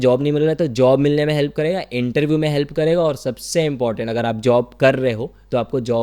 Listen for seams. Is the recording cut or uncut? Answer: uncut